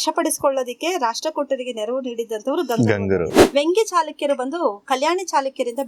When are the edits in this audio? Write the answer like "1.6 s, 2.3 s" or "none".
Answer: 3.4 s